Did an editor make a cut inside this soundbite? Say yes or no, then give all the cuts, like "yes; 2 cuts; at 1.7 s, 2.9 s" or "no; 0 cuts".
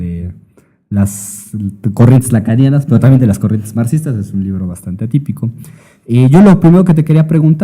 yes; 1 cut; at 1.0 s